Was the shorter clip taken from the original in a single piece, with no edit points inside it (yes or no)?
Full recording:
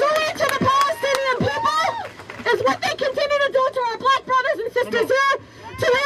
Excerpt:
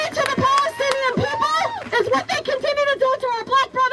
no